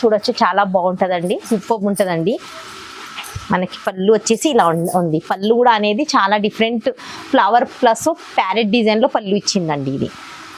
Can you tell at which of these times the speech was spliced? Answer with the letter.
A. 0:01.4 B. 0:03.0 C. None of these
A